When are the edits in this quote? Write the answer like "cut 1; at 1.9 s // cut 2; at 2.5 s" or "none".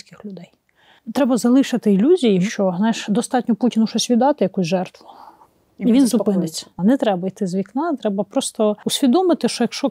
cut 1; at 1.0 s // cut 2; at 2.4 s // cut 3; at 6.7 s // cut 4; at 8.9 s